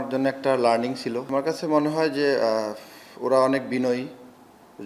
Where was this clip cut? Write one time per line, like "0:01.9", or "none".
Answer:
0:01.2